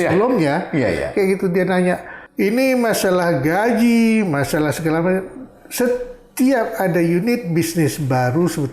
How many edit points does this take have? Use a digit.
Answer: 0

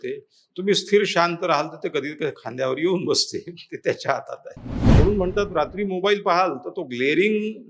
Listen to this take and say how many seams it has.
1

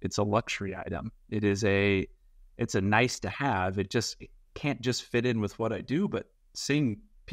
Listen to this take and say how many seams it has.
0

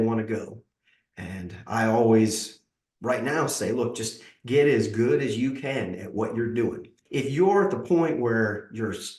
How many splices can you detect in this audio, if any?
1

